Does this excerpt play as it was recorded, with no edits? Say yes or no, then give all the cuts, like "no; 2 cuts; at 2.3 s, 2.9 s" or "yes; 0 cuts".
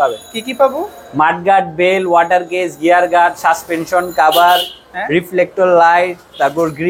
yes; 0 cuts